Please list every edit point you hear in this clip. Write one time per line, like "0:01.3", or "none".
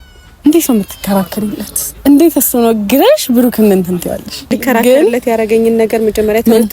0:04.5